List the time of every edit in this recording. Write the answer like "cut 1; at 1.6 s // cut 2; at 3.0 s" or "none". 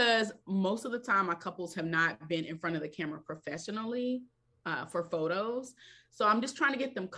none